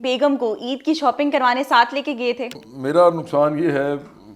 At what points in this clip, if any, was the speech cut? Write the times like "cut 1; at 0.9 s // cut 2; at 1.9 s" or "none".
cut 1; at 2.7 s